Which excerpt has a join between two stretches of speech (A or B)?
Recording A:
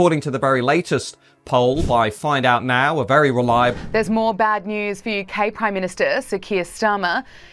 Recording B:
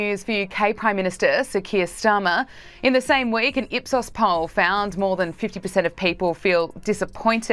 A